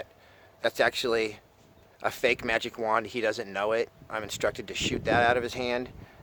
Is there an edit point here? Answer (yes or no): no